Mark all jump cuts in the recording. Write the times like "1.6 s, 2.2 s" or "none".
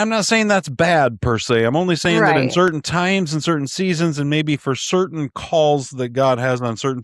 none